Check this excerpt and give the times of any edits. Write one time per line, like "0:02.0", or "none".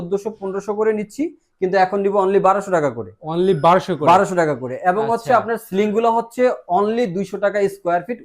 none